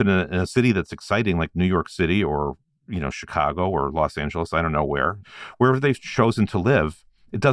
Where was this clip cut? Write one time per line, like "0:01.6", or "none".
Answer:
0:05.3